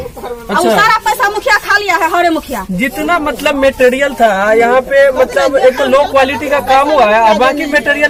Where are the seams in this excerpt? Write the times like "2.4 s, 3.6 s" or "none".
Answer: none